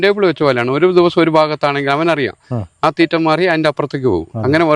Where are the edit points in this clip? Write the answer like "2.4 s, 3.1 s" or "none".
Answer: none